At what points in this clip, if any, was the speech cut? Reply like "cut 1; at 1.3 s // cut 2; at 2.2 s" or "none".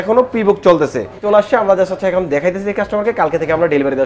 cut 1; at 1.2 s